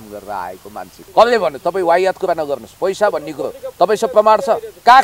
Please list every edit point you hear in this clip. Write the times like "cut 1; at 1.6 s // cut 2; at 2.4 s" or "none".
cut 1; at 0.9 s